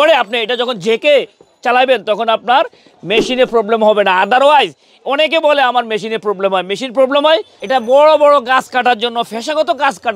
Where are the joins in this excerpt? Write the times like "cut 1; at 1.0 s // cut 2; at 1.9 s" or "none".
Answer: cut 1; at 7.5 s